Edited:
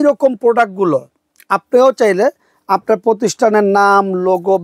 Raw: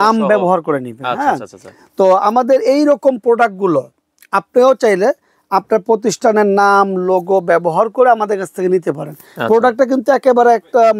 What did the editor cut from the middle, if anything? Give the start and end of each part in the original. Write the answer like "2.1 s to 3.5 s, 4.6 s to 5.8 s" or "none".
none

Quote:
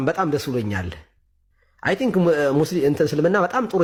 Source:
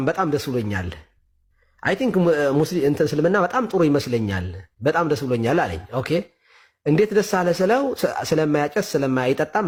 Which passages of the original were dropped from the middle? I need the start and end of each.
none

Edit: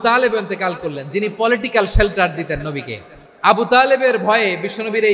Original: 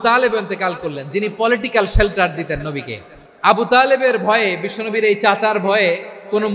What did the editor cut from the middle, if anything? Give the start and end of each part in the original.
none

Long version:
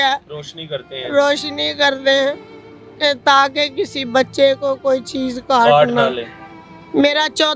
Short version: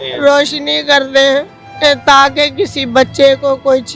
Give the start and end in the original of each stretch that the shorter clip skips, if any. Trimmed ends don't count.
2.5 s to 2.8 s

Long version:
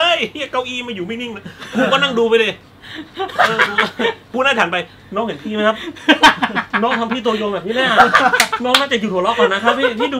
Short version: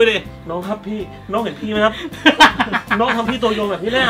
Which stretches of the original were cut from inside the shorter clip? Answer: 3.3 s to 4.8 s

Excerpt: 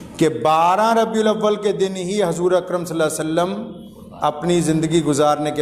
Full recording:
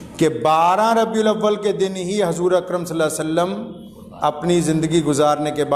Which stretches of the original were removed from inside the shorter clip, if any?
none

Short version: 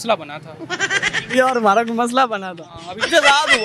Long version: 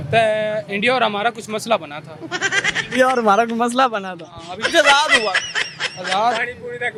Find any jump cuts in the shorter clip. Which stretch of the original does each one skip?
none

